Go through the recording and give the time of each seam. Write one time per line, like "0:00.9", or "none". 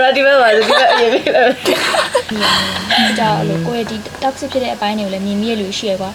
0:03.0